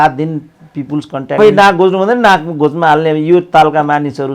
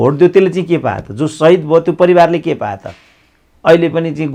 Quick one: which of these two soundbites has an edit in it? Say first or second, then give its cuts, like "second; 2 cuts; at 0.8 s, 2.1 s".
first; 1 cut; at 1.4 s